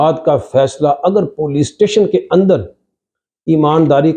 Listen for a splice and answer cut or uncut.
uncut